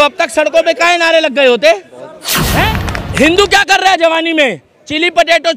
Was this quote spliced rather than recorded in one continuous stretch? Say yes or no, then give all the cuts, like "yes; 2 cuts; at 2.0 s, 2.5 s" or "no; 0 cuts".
yes; 1 cut; at 2.5 s